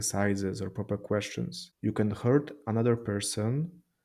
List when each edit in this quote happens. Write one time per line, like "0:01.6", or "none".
0:01.6